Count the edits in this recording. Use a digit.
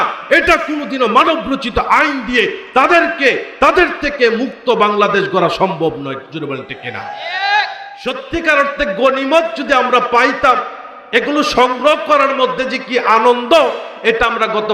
1